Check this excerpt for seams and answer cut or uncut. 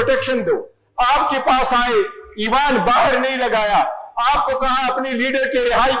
uncut